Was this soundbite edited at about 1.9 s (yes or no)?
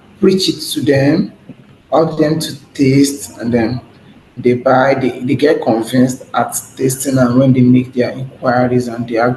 no